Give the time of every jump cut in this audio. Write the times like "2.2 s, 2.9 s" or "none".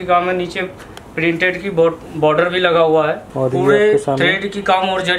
3.2 s